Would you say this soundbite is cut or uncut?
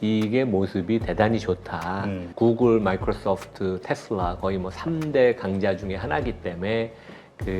cut